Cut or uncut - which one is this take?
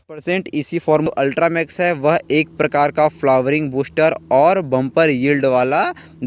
cut